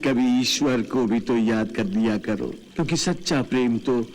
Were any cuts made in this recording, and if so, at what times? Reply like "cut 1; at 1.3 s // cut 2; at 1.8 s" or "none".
cut 1; at 2.6 s